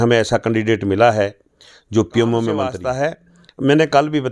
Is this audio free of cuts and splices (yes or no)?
no